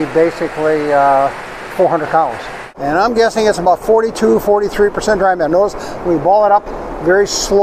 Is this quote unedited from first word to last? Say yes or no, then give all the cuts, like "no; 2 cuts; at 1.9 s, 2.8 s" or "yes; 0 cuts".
no; 1 cut; at 2.7 s